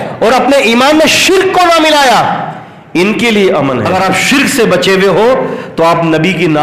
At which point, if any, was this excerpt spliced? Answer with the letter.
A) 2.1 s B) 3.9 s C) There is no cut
B